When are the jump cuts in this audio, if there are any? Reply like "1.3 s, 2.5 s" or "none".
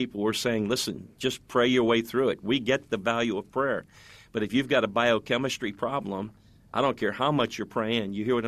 none